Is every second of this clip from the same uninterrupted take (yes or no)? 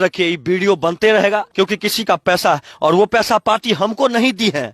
no